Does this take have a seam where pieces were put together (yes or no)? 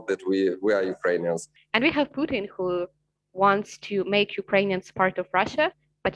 yes